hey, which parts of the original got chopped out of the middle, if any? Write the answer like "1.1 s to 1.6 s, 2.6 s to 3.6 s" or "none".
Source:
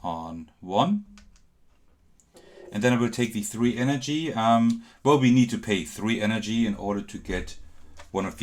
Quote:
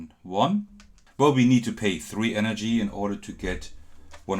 1.4 s to 4.9 s